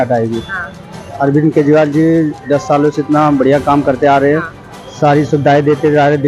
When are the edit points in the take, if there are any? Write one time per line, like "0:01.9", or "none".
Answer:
0:01.1